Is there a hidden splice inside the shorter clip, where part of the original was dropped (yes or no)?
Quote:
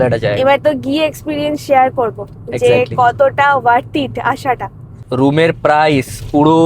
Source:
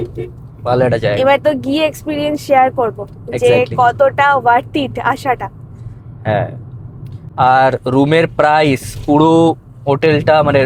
yes